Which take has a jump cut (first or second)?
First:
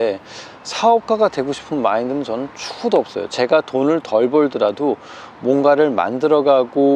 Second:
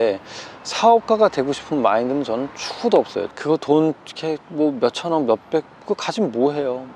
second